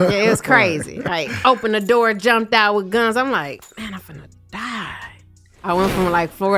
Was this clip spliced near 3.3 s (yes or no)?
no